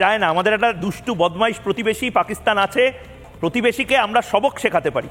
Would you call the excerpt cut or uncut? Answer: uncut